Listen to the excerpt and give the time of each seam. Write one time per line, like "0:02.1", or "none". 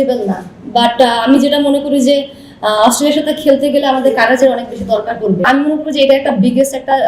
0:05.5